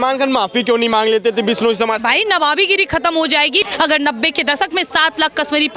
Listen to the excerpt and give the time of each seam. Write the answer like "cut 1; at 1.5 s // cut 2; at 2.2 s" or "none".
cut 1; at 3.7 s